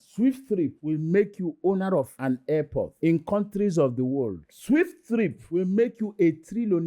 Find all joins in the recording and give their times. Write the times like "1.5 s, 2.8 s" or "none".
none